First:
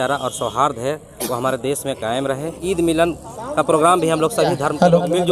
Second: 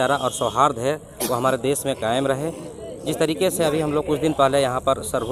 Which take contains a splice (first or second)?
first